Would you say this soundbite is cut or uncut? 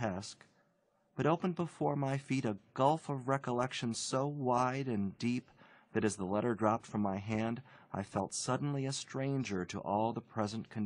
cut